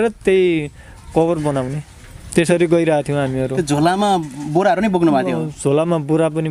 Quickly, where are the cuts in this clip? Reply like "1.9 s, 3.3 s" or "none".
none

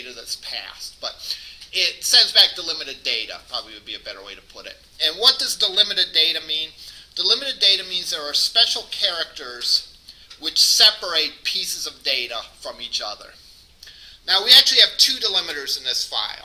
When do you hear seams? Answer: none

